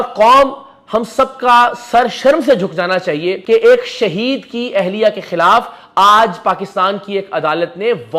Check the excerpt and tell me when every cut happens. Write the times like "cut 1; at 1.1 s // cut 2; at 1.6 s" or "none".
cut 1; at 3.3 s